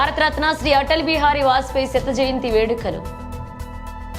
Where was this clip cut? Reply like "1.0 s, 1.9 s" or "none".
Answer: none